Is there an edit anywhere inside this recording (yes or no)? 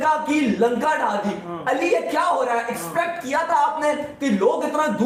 no